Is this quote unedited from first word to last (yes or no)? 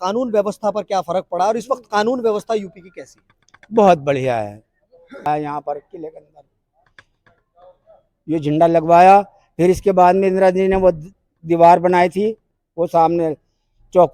no